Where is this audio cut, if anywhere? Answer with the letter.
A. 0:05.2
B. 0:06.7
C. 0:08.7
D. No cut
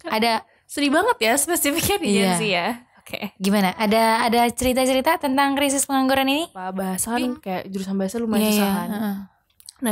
B